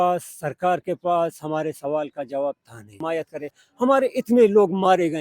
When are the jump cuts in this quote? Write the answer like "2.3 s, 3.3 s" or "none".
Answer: 2.9 s

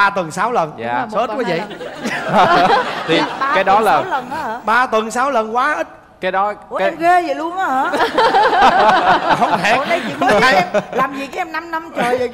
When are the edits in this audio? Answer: none

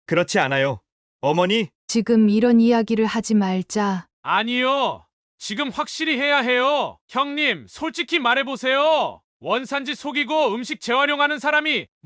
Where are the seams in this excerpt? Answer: 1.8 s, 7.0 s

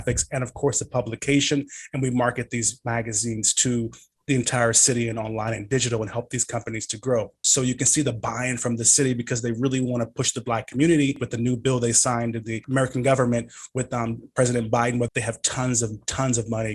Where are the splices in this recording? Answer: 7.3 s, 11.3 s, 12.5 s, 15.1 s

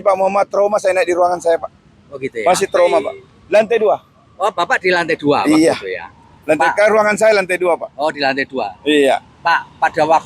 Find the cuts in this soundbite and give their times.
none

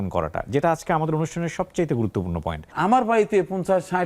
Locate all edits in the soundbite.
2.7 s

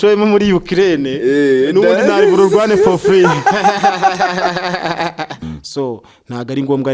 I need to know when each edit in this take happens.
5.4 s

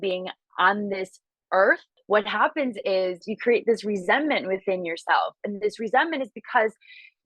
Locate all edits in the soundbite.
1.9 s, 3.3 s

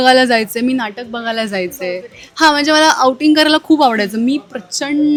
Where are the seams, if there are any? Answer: none

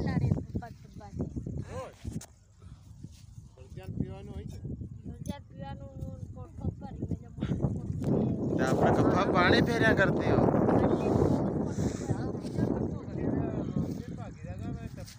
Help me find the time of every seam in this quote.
none

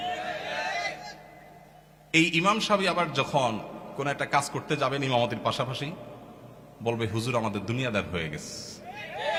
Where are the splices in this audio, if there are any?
none

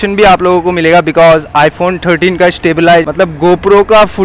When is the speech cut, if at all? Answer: 3.1 s

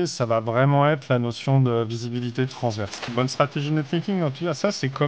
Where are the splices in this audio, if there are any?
3.1 s

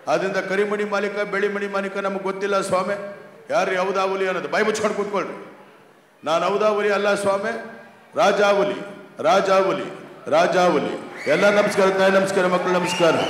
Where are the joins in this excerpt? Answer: none

